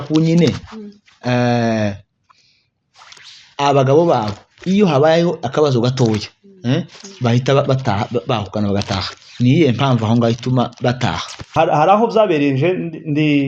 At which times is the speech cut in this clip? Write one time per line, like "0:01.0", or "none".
0:11.5